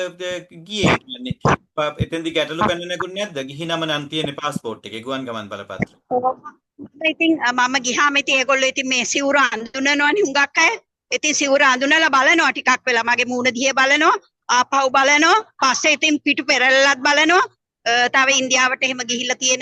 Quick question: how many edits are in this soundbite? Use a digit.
0